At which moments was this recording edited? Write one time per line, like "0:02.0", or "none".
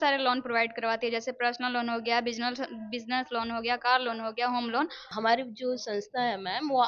0:05.0